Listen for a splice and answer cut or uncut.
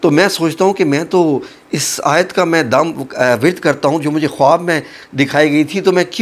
uncut